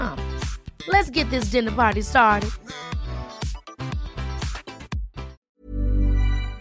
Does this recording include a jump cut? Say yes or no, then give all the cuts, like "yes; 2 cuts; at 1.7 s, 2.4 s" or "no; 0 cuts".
yes; 1 cut; at 5.5 s